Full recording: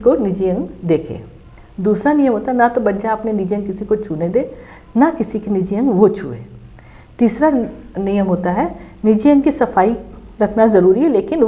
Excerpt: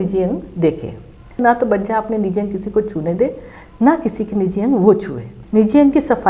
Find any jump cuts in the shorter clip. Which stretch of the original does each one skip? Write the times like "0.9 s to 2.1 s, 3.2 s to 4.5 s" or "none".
1.7 s to 2.5 s, 6.5 s to 8.8 s